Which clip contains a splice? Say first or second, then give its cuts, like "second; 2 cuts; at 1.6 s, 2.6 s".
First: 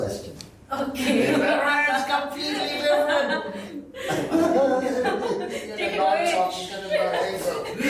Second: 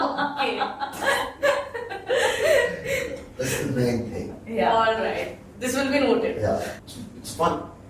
second; 1 cut; at 6.7 s